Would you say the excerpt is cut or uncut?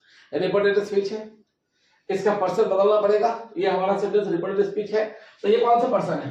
uncut